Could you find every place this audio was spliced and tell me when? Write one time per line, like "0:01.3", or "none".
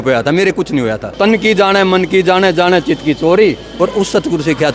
0:01.0